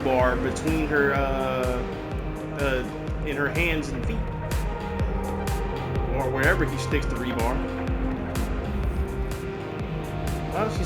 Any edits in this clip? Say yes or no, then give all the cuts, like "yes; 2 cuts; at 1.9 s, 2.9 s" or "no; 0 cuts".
no; 0 cuts